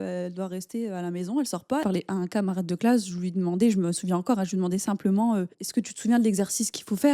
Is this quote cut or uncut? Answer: cut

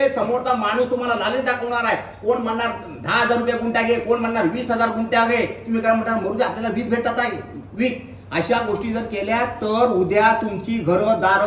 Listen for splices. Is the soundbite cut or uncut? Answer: uncut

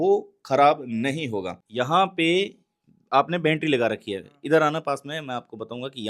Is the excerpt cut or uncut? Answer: cut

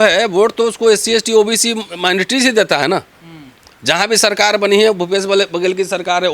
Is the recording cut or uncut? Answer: uncut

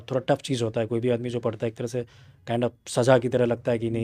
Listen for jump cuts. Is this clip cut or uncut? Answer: uncut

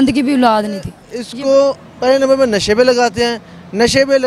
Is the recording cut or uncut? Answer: cut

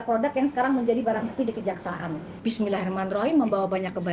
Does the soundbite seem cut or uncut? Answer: cut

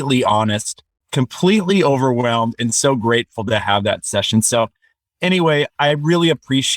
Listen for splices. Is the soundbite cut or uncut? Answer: cut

